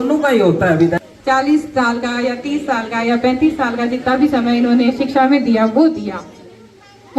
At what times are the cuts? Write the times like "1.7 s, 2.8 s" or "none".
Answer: 1.0 s